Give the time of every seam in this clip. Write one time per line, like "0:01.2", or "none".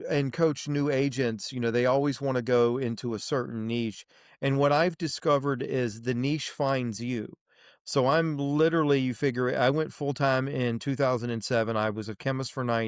none